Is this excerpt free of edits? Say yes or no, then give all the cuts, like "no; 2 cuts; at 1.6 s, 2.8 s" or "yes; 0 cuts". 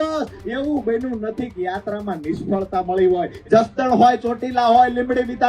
no; 1 cut; at 3.4 s